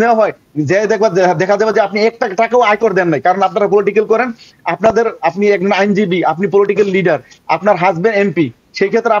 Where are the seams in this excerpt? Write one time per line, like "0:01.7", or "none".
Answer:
none